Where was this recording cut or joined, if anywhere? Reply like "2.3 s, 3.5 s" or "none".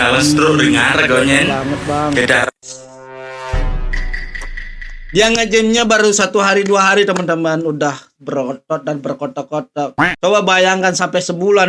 none